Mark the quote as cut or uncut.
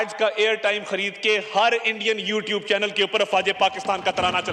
uncut